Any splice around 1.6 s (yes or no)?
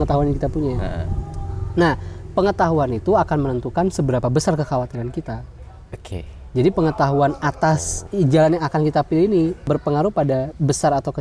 no